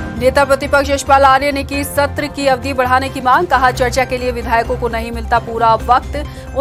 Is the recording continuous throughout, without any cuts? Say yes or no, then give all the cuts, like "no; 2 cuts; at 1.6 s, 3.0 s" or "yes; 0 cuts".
yes; 0 cuts